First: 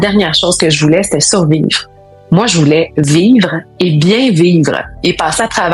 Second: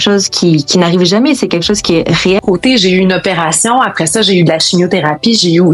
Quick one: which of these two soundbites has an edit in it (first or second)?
second